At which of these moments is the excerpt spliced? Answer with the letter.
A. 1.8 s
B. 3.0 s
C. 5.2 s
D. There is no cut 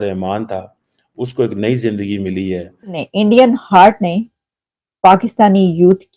B